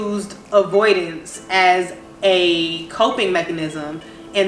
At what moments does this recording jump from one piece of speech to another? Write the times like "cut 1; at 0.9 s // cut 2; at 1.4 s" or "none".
none